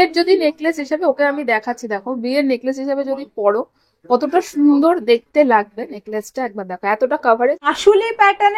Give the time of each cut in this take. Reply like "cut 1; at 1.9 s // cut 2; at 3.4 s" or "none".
cut 1; at 7.6 s